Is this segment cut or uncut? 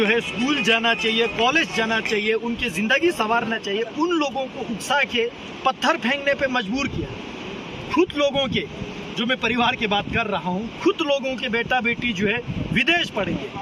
uncut